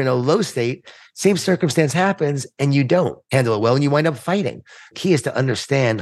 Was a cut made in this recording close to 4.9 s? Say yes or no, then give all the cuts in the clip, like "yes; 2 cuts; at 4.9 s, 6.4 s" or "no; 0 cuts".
yes; 2 cuts; at 3.2 s, 4.9 s